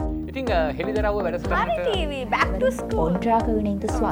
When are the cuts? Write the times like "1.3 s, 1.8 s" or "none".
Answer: none